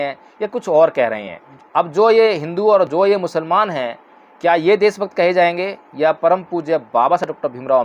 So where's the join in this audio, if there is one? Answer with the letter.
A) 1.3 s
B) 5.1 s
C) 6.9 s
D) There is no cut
D